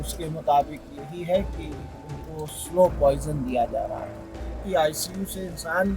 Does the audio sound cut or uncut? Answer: cut